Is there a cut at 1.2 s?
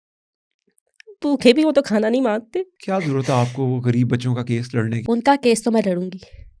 no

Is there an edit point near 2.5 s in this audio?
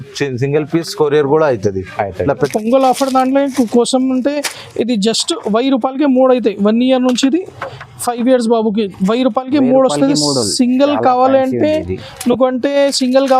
yes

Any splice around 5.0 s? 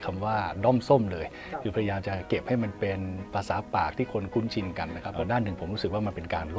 yes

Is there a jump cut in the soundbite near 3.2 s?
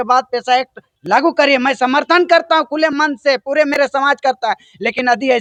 no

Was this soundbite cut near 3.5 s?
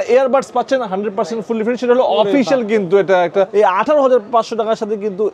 yes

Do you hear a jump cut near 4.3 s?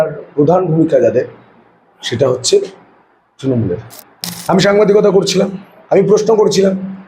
yes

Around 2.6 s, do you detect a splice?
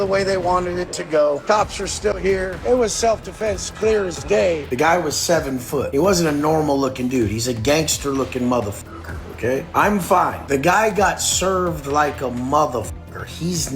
yes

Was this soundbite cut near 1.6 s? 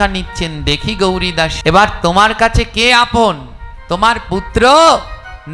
yes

